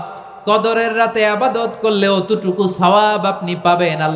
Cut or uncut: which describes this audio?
uncut